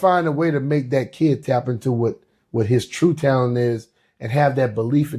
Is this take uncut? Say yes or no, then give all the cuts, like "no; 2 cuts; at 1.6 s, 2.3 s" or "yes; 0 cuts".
yes; 0 cuts